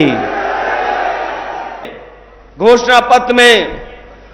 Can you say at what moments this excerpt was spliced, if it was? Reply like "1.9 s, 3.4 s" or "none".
1.7 s

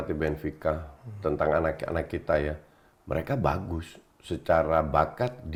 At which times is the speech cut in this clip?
none

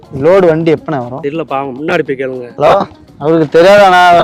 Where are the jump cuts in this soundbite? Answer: 1.1 s, 2.5 s

